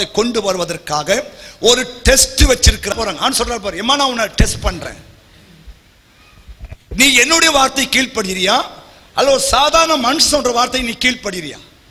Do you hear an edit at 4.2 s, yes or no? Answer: no